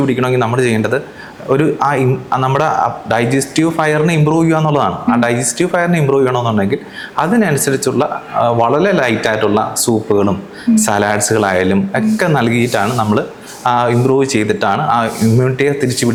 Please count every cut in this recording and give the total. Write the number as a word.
zero